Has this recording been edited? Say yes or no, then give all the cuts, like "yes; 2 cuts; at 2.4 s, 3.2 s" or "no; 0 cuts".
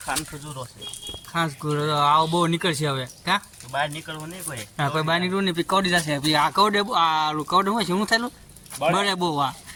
no; 0 cuts